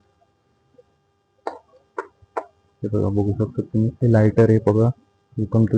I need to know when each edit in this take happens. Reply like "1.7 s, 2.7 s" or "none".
none